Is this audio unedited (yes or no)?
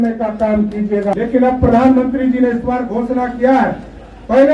no